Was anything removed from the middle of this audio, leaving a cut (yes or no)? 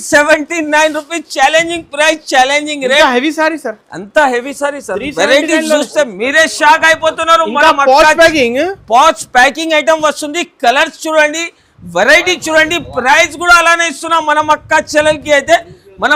no